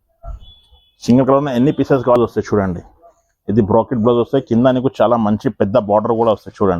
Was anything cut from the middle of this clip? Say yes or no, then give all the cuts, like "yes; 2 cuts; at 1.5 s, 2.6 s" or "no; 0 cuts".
yes; 1 cut; at 2.2 s